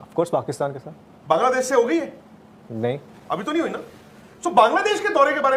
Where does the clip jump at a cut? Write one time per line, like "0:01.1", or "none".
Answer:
none